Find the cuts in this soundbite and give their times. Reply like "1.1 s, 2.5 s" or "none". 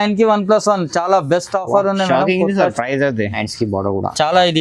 3.4 s